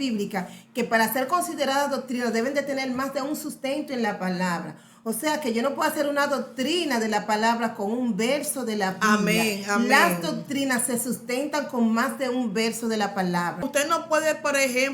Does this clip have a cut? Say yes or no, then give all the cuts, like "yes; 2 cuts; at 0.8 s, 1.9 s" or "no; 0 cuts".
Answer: yes; 1 cut; at 13.8 s